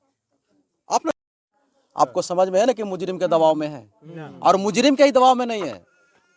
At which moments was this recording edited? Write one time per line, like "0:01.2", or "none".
0:01.1